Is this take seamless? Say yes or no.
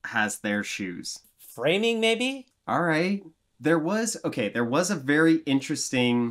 yes